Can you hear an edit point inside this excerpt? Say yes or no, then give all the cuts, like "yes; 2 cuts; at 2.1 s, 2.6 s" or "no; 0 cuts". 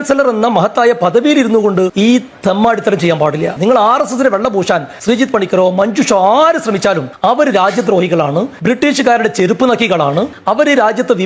yes; 4 cuts; at 1.9 s, 4.9 s, 7.1 s, 8.5 s